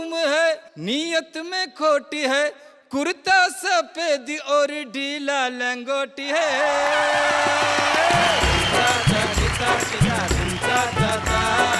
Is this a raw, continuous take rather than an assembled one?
no; 1 cut; at 8.5 s

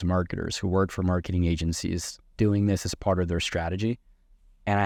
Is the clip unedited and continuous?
yes; 0 cuts

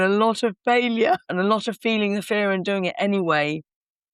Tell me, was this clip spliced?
yes; 1 cut; at 1.3 s

